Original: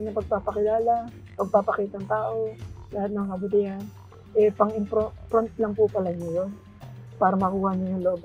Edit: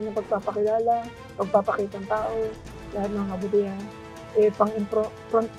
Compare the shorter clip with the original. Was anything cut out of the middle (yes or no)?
no